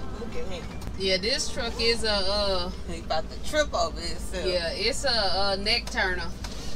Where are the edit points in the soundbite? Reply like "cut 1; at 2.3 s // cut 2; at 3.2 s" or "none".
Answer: none